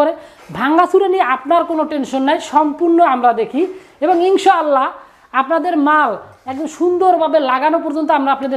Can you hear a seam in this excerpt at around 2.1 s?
no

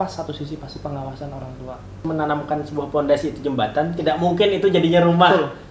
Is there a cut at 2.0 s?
yes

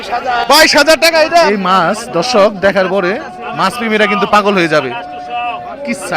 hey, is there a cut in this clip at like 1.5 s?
yes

